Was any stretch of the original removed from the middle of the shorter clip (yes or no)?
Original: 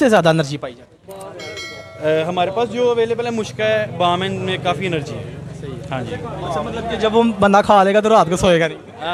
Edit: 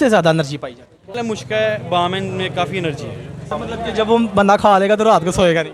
yes